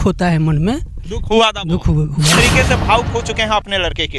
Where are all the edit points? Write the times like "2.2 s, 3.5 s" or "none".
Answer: 2.4 s